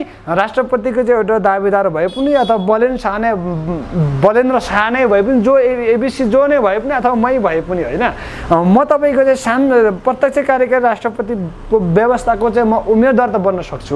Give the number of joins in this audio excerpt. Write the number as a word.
zero